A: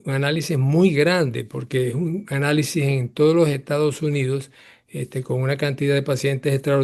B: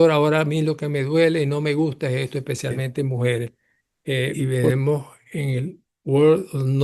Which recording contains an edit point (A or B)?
B